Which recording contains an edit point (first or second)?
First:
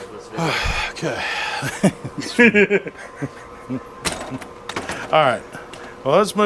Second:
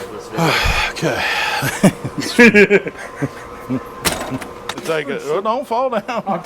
second